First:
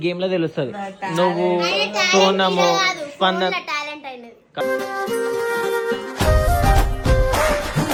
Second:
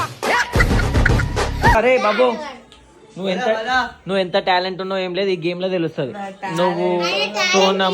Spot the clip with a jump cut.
second; 1 cut; at 1.8 s

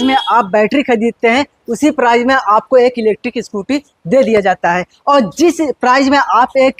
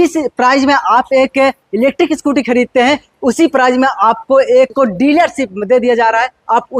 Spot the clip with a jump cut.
second; 1 cut; at 4.7 s

